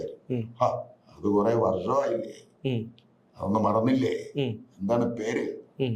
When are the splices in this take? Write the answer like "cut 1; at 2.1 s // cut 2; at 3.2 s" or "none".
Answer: none